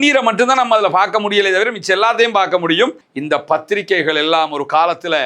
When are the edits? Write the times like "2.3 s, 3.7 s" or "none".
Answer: 3.1 s